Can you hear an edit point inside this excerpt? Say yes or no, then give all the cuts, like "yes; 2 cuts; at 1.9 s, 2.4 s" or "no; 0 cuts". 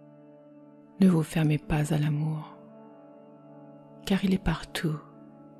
yes; 3 cuts; at 1.0 s, 2.5 s, 4.0 s